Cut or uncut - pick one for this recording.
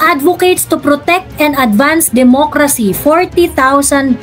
uncut